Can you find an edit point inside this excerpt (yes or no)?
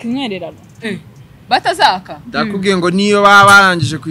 no